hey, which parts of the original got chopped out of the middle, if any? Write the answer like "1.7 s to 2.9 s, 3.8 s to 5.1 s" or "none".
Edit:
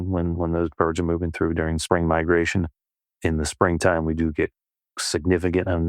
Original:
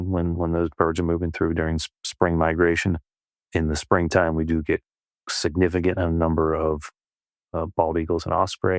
1.8 s to 2.1 s